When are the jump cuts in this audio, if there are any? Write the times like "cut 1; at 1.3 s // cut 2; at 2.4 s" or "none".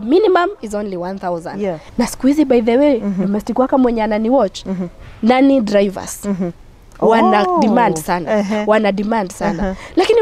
cut 1; at 1.9 s